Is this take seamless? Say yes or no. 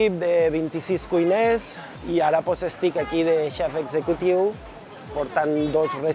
no